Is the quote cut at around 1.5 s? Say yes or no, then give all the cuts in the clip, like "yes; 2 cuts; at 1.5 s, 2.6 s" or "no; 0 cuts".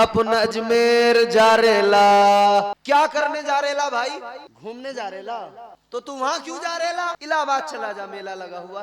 no; 4 cuts; at 2.7 s, 4.5 s, 5.7 s, 7.2 s